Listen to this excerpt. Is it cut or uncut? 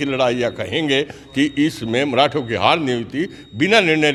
uncut